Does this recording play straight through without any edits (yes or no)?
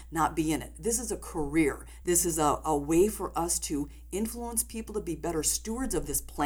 no